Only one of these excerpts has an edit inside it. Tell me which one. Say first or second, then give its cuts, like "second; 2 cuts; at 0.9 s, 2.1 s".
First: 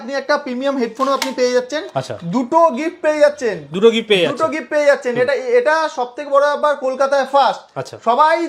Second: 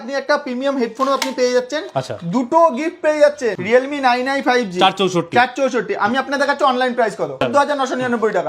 second; 2 cuts; at 3.6 s, 7.4 s